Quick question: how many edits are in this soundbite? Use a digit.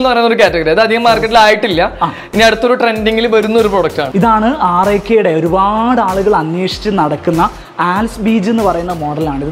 1